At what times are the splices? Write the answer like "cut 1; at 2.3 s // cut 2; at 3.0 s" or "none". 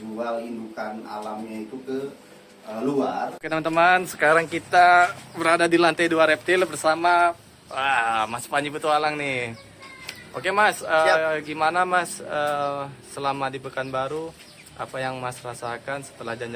cut 1; at 3.4 s